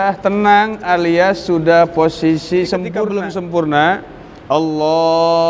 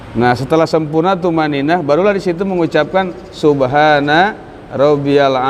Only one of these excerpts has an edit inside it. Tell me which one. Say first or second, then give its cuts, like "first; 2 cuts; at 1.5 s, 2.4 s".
first; 1 cut; at 3.0 s